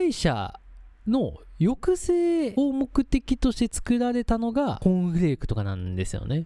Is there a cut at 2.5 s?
yes; 2 cuts; at 2.5 s, 4.8 s

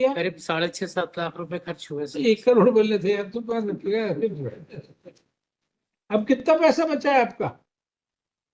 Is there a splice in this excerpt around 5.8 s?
yes; 1 cut; at 5.8 s

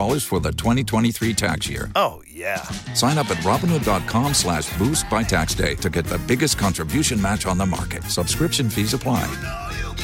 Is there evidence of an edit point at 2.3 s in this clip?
no; 0 cuts

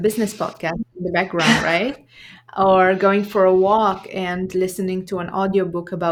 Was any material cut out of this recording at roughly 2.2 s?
no; 0 cuts

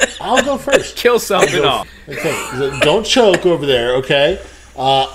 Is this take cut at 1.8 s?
yes; 1 cut; at 1.8 s

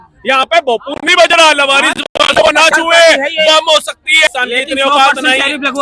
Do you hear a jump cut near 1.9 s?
no; 1 cut; at 4.3 s

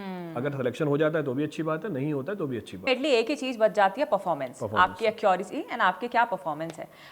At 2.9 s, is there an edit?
yes; 1 cut; at 2.9 s

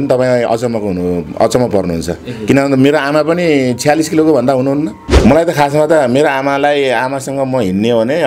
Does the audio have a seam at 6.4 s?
no; 1 cut; at 5.1 s

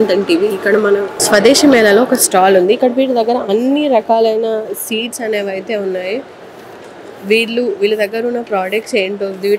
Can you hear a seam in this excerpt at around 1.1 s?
yes; 1 cut; at 1.1 s

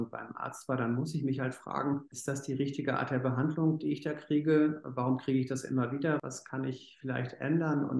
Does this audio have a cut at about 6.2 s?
yes; 2 cuts; at 2.1 s, 6.2 s

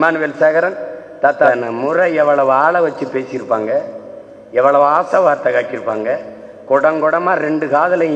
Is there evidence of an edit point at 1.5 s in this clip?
yes; 1 cut; at 1.5 s

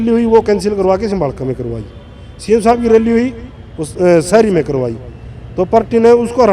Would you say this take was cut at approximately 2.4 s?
no; 0 cuts

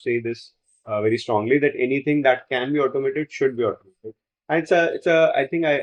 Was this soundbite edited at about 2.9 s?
no; 0 cuts

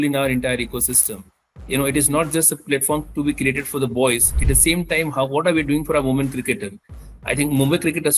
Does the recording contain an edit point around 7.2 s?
no; 0 cuts

